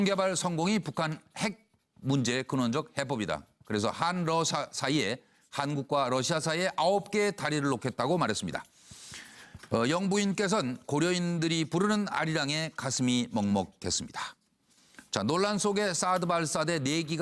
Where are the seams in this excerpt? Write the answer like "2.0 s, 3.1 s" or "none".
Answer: 10.8 s